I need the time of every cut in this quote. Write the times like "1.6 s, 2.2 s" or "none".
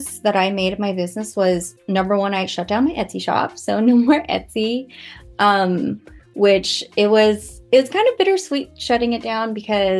none